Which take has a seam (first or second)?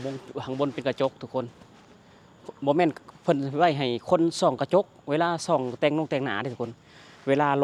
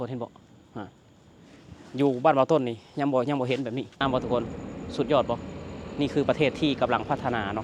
second